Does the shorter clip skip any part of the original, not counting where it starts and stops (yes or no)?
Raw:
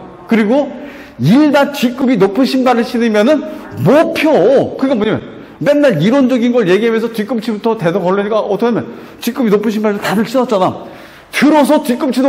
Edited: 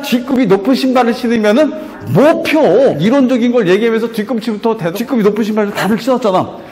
yes